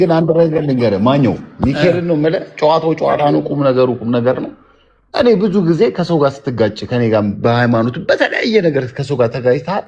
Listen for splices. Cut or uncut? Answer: uncut